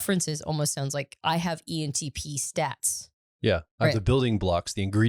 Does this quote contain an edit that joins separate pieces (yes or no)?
no